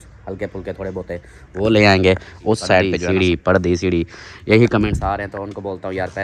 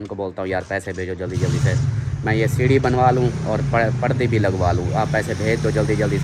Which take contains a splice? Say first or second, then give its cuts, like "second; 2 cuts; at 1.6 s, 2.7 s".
first; 1 cut; at 2.9 s